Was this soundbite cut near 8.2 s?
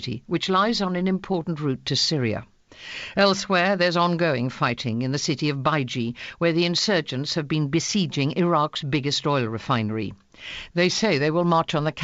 yes; 1 cut; at 8.2 s

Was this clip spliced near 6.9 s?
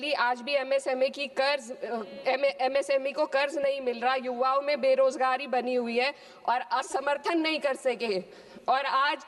yes; 1 cut; at 6.9 s

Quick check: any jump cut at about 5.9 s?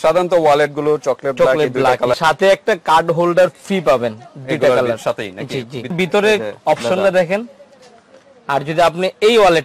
yes; 2 cuts; at 2.2 s, 5.9 s

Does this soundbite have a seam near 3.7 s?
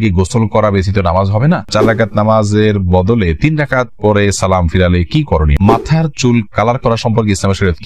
no; 2 cuts; at 1.7 s, 5.5 s

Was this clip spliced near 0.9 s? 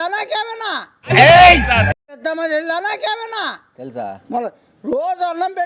no; 0 cuts

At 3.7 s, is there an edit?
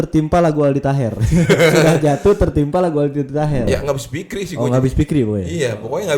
yes; 1 cut; at 3.7 s

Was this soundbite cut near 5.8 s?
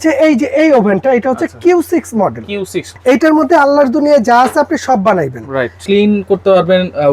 yes; 2 cuts; at 2.8 s, 5.8 s

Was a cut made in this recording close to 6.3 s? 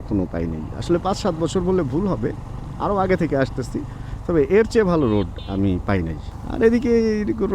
yes; 1 cut; at 6.3 s

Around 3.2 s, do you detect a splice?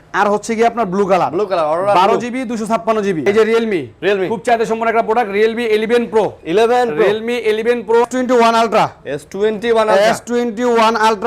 yes; 2 cuts; at 3.2 s, 8.1 s

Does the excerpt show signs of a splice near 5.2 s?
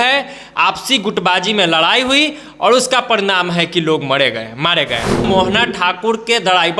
yes; 1 cut; at 5.2 s

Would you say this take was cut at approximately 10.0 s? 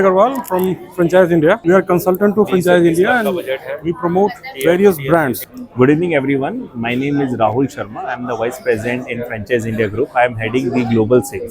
no; 2 cuts; at 1.6 s, 5.6 s

